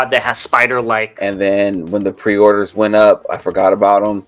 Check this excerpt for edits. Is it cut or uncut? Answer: cut